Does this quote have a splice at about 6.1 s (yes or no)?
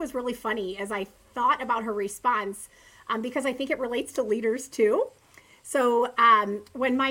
no